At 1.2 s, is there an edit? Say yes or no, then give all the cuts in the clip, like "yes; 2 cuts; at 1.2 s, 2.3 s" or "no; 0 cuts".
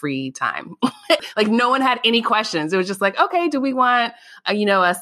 yes; 1 cut; at 1.2 s